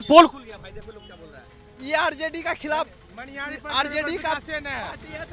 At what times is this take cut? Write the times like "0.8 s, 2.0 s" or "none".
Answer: none